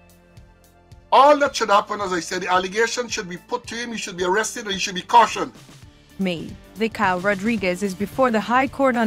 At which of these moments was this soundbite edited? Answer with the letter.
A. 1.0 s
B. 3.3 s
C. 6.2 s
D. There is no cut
C